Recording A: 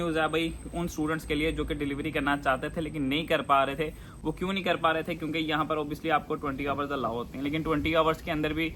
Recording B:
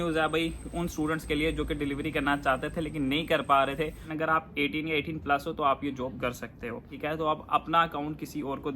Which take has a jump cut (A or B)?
B